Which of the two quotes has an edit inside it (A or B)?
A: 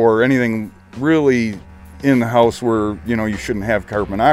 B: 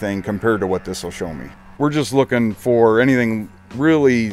B